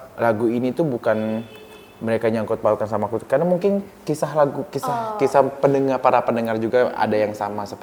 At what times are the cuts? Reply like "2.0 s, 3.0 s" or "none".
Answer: none